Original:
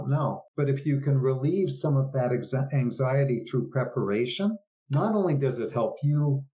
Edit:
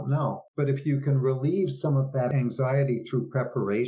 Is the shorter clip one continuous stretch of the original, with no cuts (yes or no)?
no